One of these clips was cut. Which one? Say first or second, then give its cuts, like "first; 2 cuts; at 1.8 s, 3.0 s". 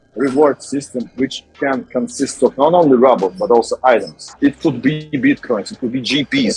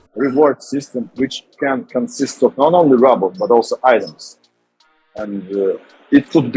first; 1 cut; at 4.2 s